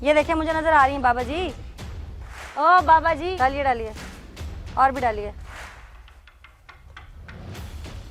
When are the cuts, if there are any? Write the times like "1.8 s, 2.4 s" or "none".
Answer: none